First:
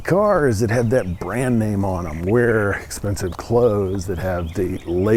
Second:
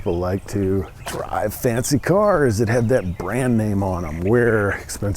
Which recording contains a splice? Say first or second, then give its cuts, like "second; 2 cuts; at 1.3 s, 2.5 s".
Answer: second; 1 cut; at 1.0 s